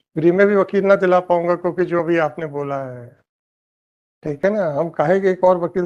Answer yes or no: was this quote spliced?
no